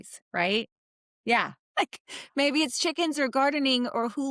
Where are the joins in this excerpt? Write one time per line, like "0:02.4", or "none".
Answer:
0:01.6